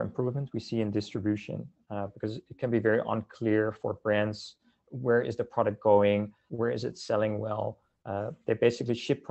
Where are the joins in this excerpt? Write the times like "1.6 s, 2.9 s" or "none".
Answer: 6.4 s